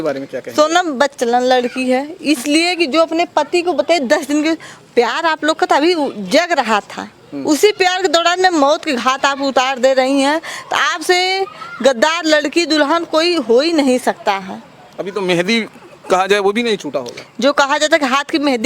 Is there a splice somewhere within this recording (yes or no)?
no